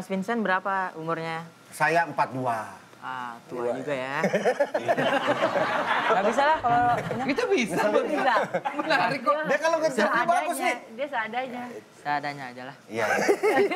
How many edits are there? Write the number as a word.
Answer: zero